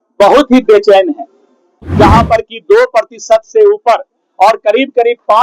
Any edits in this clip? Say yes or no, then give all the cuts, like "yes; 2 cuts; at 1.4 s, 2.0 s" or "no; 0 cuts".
yes; 1 cut; at 1.8 s